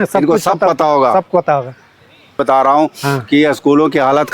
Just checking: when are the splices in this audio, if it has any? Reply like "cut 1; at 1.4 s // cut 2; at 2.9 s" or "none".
cut 1; at 2.4 s